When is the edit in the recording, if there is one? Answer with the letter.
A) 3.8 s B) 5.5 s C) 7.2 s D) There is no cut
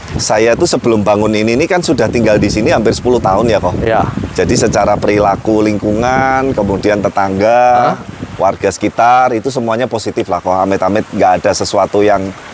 D